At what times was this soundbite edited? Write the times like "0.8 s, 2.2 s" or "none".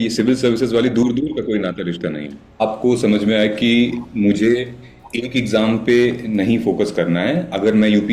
2.6 s